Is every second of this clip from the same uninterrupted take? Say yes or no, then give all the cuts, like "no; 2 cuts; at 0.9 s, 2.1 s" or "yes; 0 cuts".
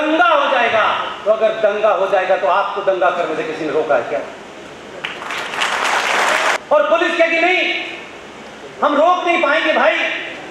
yes; 0 cuts